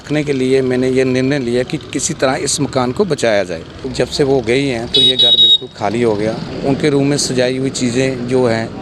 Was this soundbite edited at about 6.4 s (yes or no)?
yes